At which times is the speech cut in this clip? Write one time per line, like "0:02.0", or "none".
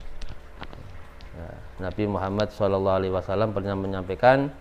none